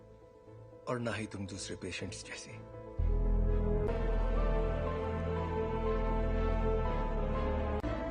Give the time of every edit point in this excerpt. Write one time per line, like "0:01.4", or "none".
0:03.9